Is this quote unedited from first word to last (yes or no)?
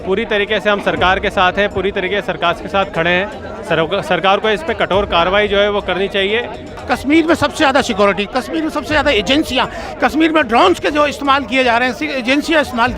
no